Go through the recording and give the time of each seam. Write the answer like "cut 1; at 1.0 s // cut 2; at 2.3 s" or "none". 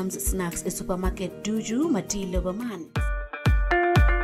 cut 1; at 2.9 s